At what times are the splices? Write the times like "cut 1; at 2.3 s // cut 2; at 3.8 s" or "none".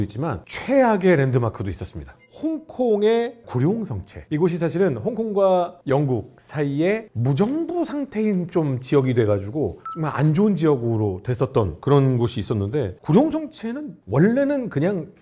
none